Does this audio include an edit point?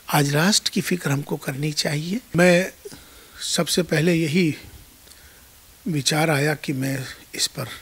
yes; 1 cut; at 2.1 s

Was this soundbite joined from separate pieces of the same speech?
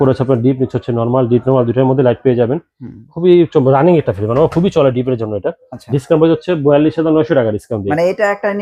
no; 0 cuts

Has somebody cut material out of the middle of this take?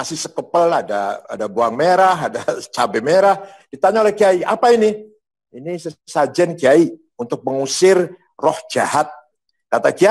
no; 0 cuts

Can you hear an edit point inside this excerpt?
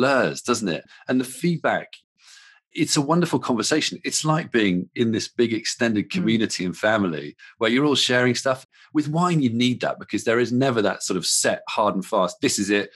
yes; 1 cut; at 8.7 s

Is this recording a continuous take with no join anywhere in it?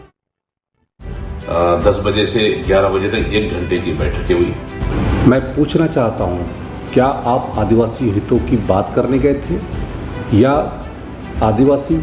no; 1 cut; at 4.9 s

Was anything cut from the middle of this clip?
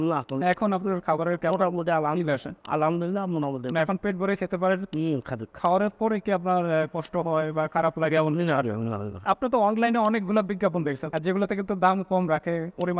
yes; 2 cuts; at 9.2 s, 11.0 s

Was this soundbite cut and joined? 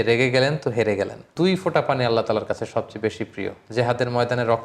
yes; 1 cut; at 1.3 s

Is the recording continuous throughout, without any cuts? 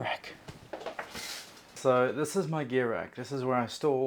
yes; 0 cuts

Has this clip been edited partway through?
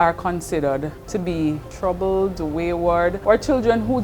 yes; 3 cuts; at 1.0 s, 1.7 s, 3.2 s

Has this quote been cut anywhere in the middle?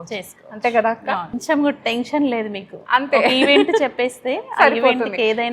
yes; 1 cut; at 1.4 s

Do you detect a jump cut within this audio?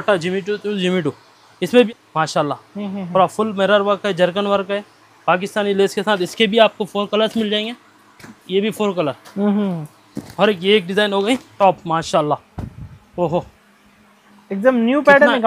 yes; 2 cuts; at 1.9 s, 11.6 s

